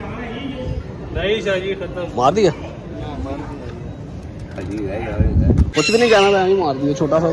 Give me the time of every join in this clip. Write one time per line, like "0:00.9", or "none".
0:05.7